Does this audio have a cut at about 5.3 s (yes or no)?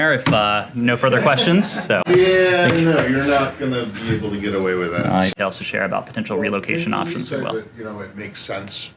yes